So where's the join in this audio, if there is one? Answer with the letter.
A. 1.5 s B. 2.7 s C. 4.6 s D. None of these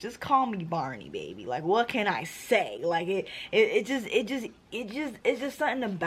D